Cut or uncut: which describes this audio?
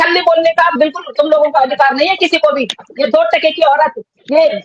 cut